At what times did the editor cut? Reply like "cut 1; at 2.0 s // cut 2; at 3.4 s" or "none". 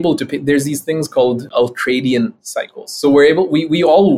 cut 1; at 1.5 s